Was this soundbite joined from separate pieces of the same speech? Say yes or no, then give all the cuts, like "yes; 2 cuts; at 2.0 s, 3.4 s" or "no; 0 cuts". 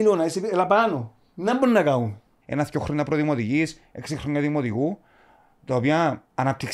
yes; 1 cut; at 2.4 s